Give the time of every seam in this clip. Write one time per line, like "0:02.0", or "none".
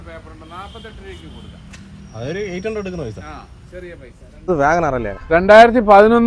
0:04.5